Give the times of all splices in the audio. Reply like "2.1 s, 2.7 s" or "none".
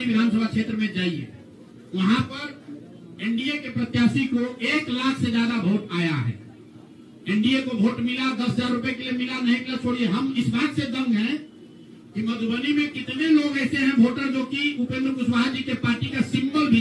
none